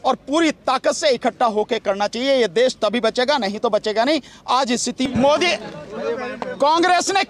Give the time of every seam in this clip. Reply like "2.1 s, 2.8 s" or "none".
5.1 s